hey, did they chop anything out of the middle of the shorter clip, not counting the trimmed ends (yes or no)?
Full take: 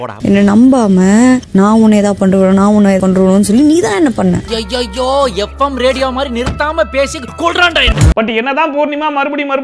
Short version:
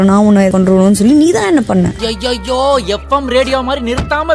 no